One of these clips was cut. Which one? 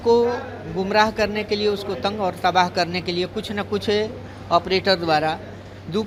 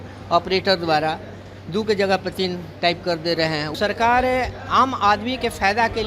second; 1 cut; at 3.7 s

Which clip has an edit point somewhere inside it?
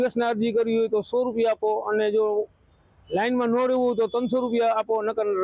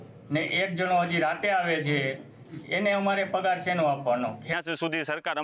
second; 1 cut; at 4.4 s

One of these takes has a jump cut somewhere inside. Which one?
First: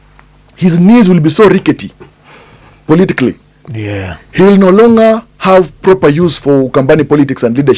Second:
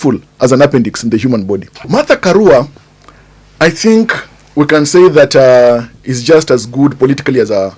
second; 1 cut; at 1.8 s

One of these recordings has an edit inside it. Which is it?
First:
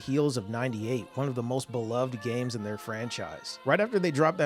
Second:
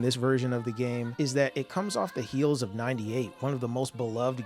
first; 1 cut; at 3.5 s

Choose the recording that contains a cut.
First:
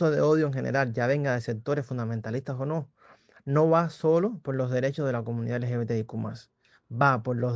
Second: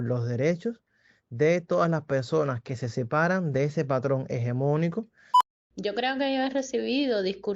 second; 1 cut; at 5.2 s

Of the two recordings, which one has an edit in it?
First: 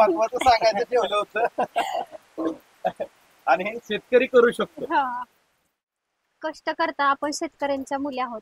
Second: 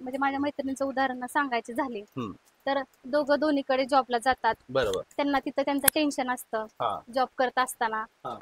first; 1 cut; at 5.7 s

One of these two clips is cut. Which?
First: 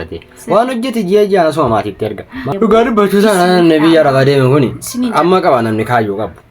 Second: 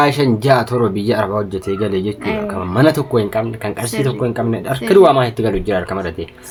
first; 1 cut; at 2.4 s

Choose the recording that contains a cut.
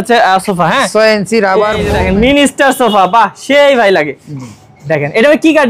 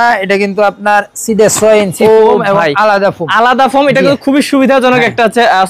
first; 1 cut; at 1.9 s

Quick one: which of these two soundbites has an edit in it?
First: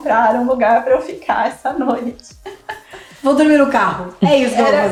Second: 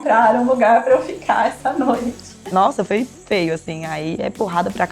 second; 1 cut; at 2.5 s

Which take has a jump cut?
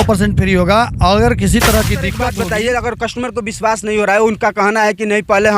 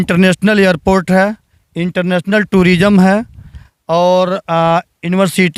first; 1 cut; at 2.2 s

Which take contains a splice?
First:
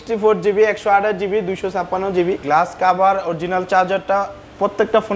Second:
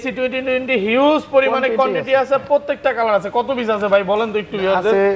first; 1 cut; at 2.4 s

